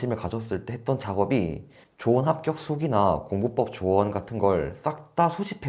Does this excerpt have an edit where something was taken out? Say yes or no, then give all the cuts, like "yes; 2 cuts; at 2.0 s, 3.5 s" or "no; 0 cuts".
no; 0 cuts